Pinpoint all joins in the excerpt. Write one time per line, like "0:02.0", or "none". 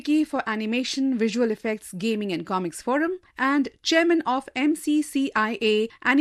none